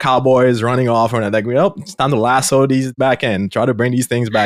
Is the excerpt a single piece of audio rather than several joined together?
yes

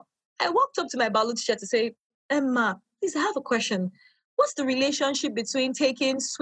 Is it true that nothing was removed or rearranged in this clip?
yes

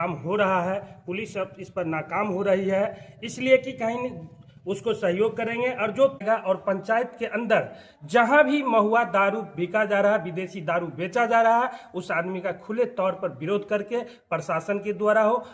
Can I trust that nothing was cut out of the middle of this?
yes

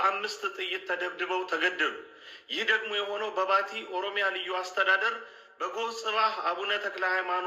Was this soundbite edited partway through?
no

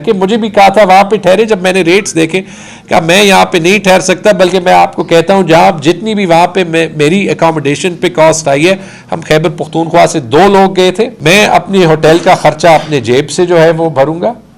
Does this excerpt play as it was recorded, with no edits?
no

